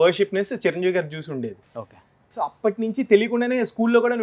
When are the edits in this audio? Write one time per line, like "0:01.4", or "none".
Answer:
none